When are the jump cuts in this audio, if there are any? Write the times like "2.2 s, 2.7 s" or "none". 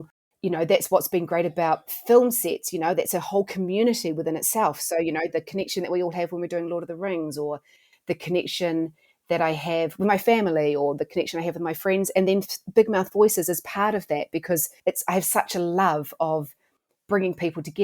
14.7 s